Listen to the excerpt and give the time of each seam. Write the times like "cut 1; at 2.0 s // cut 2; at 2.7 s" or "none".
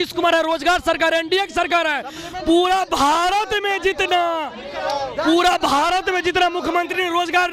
none